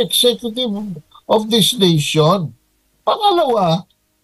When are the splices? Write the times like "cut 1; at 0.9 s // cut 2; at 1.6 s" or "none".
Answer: none